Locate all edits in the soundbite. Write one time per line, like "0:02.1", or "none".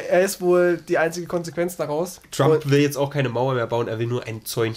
0:02.2